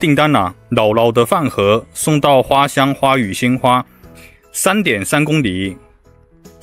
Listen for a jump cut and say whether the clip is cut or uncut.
uncut